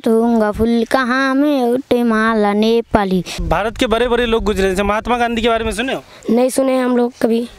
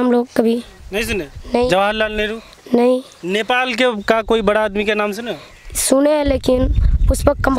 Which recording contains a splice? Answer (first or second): first